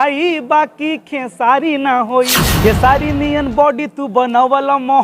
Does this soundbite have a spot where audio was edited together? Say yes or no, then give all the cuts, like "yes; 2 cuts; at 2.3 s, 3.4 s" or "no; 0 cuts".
yes; 1 cut; at 2.4 s